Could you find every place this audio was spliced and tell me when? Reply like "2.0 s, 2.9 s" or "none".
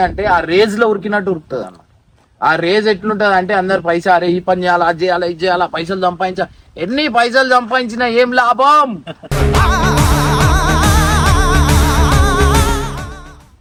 none